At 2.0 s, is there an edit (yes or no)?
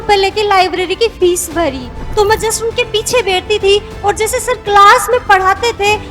yes